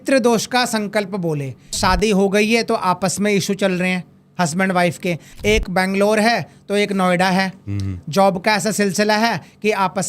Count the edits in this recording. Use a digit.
2